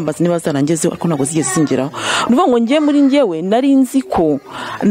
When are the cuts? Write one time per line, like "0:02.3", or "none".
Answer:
none